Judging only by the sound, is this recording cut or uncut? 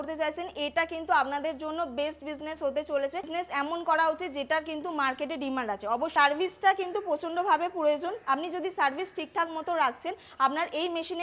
cut